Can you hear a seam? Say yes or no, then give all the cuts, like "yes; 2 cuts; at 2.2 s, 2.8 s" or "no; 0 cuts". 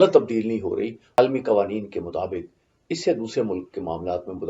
yes; 1 cut; at 1.2 s